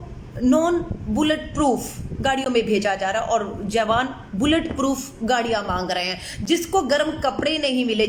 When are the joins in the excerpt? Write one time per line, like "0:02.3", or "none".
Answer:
none